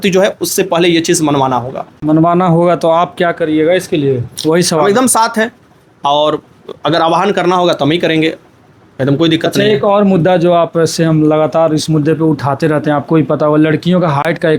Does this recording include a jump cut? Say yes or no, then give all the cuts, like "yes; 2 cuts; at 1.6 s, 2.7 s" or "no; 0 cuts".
no; 0 cuts